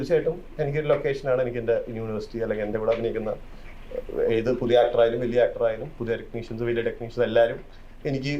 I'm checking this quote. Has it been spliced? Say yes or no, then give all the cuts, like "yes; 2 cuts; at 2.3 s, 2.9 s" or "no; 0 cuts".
no; 0 cuts